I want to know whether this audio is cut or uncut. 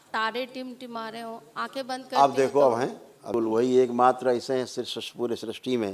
cut